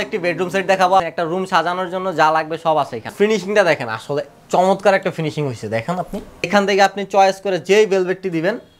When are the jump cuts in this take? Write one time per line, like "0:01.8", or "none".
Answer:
0:01.0
0:03.1
0:06.5

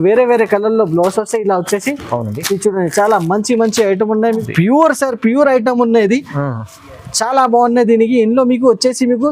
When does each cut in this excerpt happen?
0:04.4

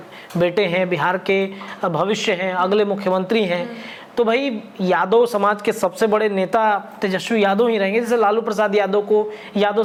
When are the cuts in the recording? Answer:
none

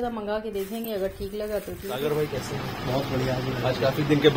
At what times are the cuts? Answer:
0:02.0

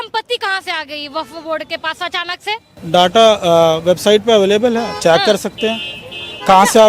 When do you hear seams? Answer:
none

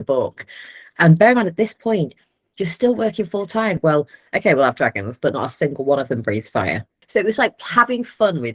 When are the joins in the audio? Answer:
0:03.8
0:06.9

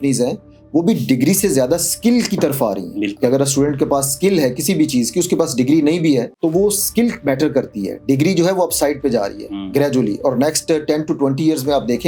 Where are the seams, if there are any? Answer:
none

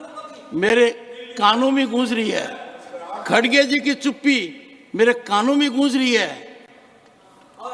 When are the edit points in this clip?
none

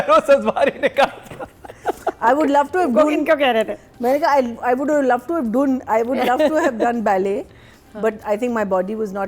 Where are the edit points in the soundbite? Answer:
none

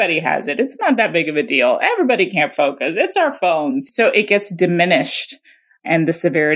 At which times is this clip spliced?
0:03.8

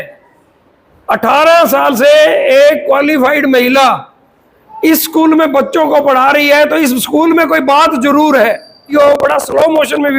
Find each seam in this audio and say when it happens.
0:08.9

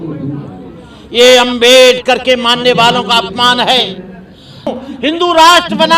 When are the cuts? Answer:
0:04.8

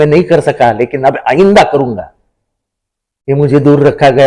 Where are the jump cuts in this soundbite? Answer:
none

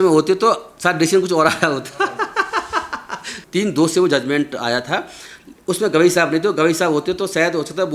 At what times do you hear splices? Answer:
0:03.4

